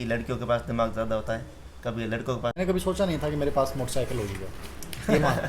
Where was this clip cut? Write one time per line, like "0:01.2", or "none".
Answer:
0:02.5